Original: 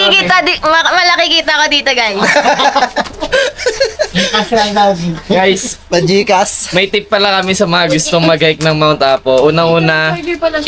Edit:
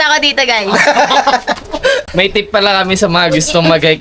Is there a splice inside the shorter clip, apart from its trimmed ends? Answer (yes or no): yes